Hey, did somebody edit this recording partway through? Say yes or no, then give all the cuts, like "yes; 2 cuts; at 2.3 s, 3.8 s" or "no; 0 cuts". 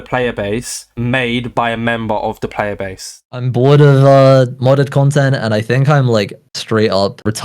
yes; 1 cut; at 3.3 s